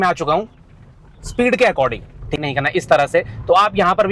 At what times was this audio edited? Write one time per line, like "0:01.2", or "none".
0:02.4